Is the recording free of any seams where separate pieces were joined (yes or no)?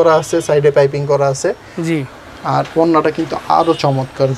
yes